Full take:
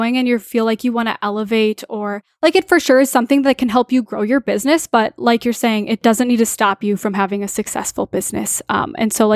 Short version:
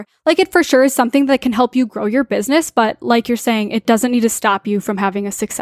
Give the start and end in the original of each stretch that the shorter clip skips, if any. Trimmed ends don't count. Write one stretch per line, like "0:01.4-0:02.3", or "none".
none